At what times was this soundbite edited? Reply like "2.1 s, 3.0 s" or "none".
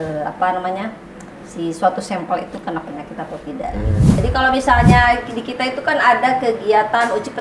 4.2 s